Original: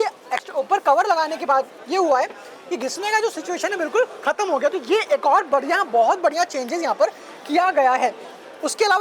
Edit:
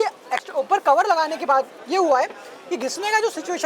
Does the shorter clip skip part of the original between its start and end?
no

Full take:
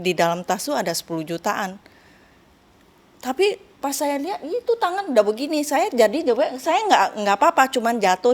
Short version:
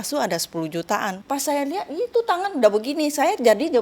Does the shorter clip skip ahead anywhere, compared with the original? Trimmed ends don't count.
yes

